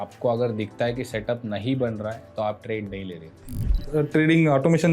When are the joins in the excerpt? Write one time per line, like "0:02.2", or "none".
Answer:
0:03.8